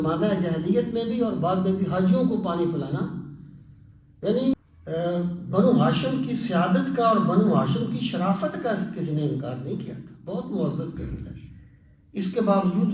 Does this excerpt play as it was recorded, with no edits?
no; 1 cut; at 4.5 s

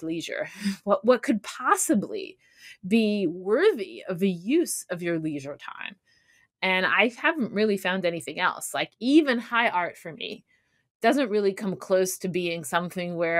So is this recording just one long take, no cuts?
yes; 0 cuts

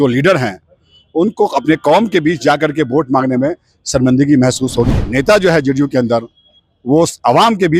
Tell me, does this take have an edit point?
yes; 1 cut; at 4.9 s

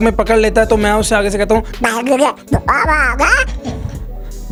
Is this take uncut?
yes; 0 cuts

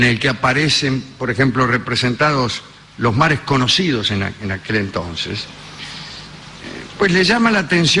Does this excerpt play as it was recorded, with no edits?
yes; 0 cuts

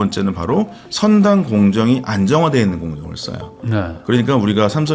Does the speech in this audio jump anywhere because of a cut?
no; 0 cuts

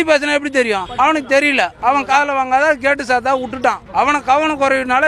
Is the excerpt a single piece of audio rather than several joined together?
no; 3 cuts; at 0.9 s, 1.7 s, 3.8 s

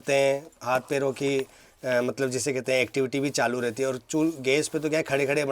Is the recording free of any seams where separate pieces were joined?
yes; 0 cuts

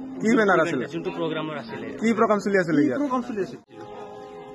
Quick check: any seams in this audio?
yes; 1 cut; at 3.6 s

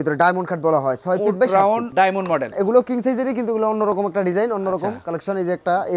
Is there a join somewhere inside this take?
yes; 1 cut; at 2.0 s

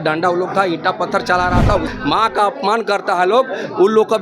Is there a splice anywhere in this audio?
yes; 1 cut; at 1.9 s

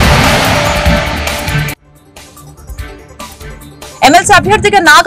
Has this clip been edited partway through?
no; 0 cuts

